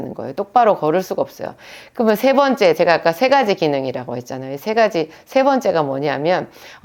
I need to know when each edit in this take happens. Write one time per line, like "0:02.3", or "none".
none